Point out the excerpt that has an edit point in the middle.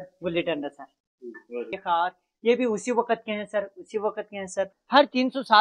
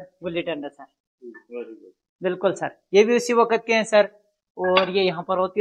first; 2 cuts; at 1.7 s, 4.8 s

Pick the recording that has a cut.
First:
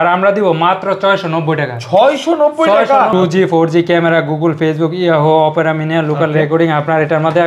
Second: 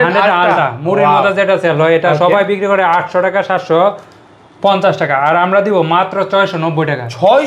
first; 1 cut; at 3.1 s

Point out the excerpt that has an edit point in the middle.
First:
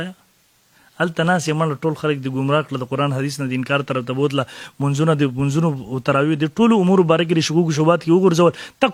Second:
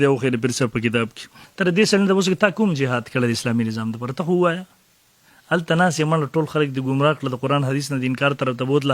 second; 1 cut; at 1.4 s

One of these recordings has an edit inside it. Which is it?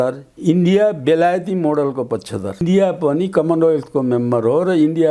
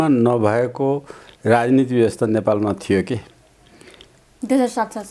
first; 1 cut; at 2.6 s

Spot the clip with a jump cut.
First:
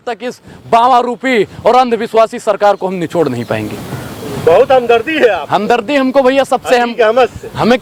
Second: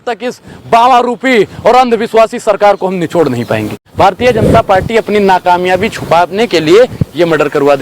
second; 1 cut; at 3.8 s

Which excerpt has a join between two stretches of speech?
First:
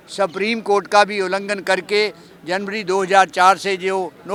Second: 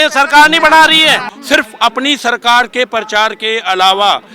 second; 1 cut; at 1.3 s

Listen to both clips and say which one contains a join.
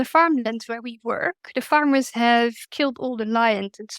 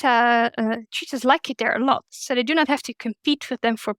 first; 1 cut; at 2.6 s

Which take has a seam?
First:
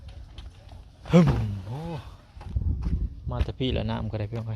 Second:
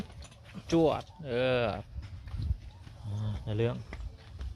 first; 1 cut; at 2.4 s

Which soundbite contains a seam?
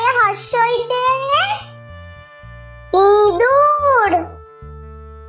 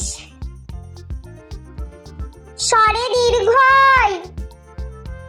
first; 1 cut; at 4.3 s

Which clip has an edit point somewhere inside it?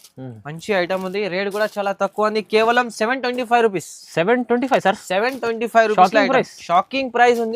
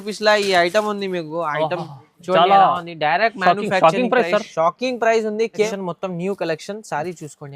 second; 1 cut; at 5.7 s

